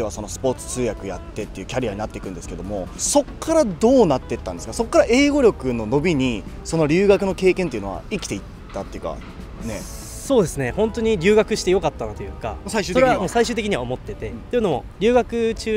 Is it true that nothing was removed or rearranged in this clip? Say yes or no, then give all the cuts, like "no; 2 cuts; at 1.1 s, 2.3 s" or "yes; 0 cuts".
yes; 0 cuts